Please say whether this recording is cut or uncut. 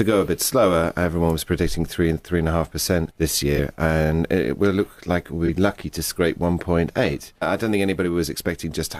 uncut